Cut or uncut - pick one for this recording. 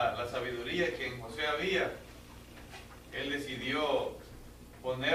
uncut